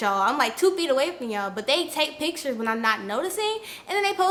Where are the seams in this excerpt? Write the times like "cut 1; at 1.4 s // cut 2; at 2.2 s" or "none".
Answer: none